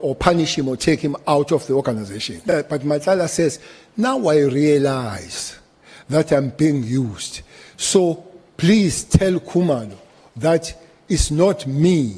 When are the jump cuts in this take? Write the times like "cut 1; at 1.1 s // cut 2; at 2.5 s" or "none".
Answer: cut 1; at 2.4 s